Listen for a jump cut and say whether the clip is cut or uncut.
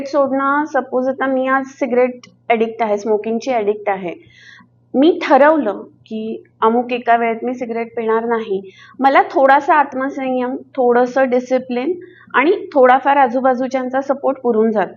uncut